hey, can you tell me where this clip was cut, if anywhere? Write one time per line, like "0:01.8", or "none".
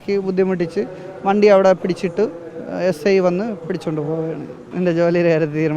0:04.6